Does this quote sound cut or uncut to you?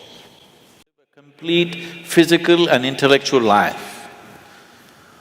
cut